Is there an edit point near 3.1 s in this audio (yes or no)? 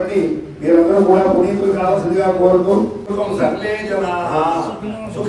yes